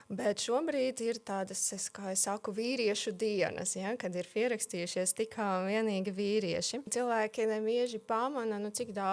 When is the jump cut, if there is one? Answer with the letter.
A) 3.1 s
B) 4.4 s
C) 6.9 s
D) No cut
C